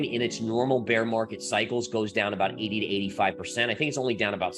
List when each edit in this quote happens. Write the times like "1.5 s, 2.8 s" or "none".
none